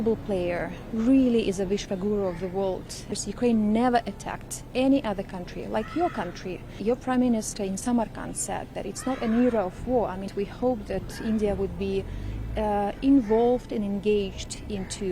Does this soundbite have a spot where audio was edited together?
yes; 3 cuts; at 3.2 s, 6.7 s, 10.3 s

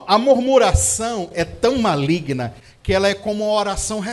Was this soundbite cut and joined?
no; 0 cuts

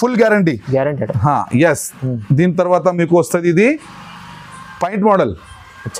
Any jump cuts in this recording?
no; 0 cuts

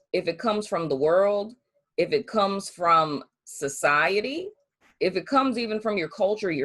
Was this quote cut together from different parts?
yes; 1 cut; at 4.9 s

